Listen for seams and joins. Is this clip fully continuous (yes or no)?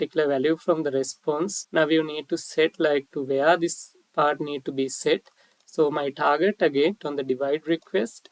no